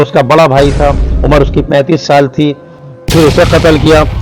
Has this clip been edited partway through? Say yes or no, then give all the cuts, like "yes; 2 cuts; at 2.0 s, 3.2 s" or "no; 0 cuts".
yes; 1 cut; at 2.8 s